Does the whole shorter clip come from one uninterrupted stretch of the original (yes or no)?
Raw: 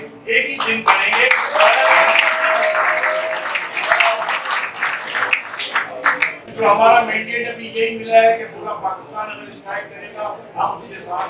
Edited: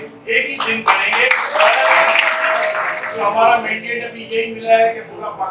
no